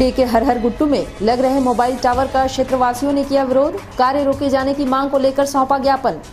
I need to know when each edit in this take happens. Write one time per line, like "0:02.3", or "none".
none